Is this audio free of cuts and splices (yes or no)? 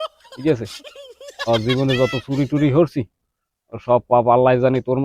yes